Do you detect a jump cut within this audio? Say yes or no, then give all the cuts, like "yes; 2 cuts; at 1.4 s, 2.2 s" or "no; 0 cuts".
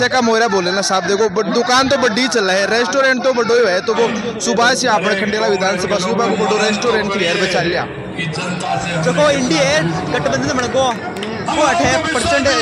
no; 0 cuts